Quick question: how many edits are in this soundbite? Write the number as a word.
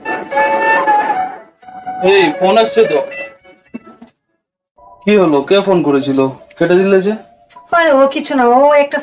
one